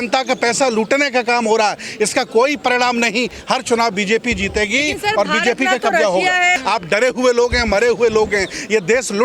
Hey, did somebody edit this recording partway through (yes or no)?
yes